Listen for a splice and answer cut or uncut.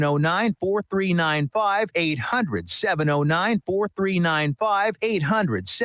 cut